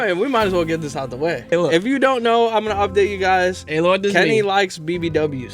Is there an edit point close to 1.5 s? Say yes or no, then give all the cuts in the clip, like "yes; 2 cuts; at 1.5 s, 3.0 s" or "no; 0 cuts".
yes; 1 cut; at 1.5 s